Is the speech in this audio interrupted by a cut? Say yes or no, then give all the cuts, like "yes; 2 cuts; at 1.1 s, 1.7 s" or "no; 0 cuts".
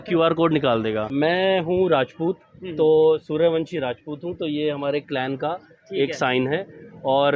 yes; 1 cut; at 1.1 s